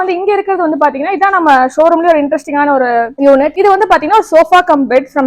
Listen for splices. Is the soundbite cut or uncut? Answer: cut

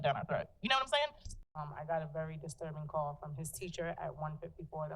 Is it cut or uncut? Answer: cut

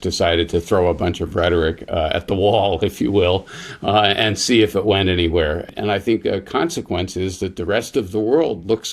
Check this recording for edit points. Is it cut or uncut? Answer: cut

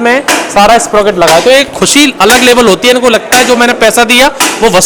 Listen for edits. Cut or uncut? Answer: uncut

